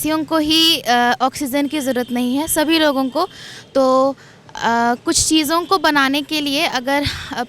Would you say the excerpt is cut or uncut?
uncut